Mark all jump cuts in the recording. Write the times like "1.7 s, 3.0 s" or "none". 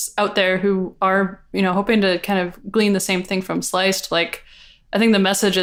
none